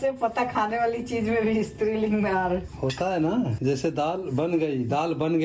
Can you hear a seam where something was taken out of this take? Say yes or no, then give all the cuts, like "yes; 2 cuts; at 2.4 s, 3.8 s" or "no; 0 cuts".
no; 0 cuts